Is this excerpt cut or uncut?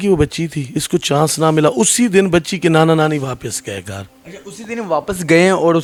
uncut